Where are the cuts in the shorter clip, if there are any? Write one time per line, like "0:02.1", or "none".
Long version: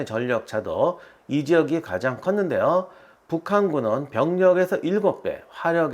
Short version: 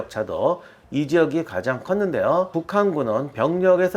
0:02.6